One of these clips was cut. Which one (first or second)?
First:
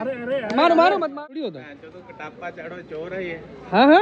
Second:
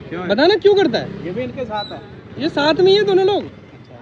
first